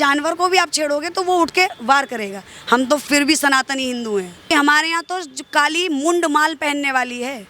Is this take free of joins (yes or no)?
no